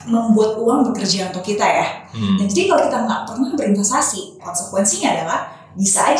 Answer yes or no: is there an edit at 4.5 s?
yes